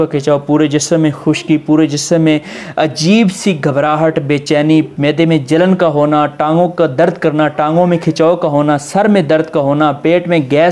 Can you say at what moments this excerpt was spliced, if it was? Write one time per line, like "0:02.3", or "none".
none